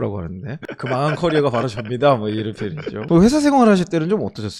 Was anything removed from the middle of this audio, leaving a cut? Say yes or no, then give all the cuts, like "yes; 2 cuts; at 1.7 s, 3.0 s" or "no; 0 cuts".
no; 0 cuts